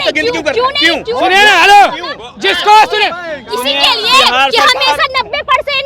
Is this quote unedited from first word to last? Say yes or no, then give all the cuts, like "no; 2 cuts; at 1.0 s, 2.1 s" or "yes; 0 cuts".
yes; 0 cuts